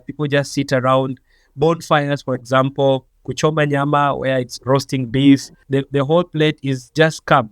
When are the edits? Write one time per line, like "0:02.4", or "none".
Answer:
0:05.6